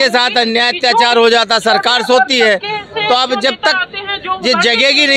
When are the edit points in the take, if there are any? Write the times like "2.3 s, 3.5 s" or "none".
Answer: none